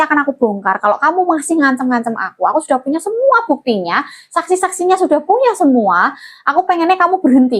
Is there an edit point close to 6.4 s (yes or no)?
no